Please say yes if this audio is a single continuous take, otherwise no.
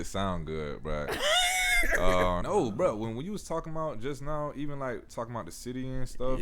no